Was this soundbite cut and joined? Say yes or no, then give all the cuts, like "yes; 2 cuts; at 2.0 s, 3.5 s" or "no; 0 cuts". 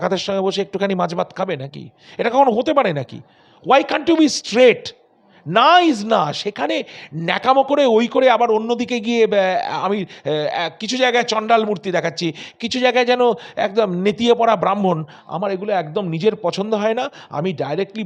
no; 0 cuts